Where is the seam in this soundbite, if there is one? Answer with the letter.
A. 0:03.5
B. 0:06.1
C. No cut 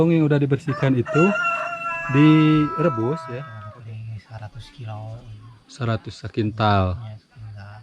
A